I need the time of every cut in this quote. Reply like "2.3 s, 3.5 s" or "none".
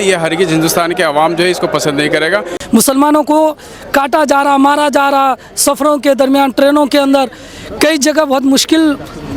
2.5 s